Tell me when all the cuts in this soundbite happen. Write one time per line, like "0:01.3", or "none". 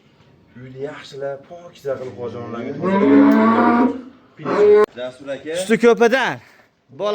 0:04.8